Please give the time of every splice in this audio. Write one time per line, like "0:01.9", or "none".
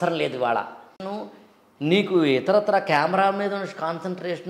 0:01.0